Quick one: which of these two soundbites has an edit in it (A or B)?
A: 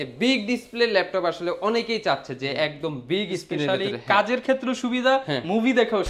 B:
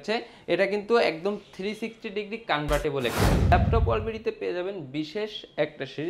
B